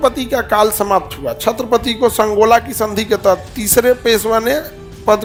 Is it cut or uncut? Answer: uncut